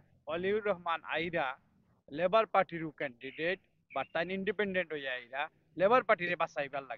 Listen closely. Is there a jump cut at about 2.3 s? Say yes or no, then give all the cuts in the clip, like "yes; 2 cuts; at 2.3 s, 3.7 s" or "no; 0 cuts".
no; 0 cuts